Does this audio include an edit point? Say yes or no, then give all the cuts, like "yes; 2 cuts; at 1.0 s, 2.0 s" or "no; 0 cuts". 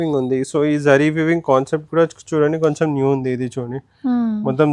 no; 0 cuts